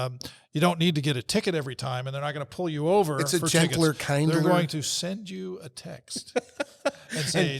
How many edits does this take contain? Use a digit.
0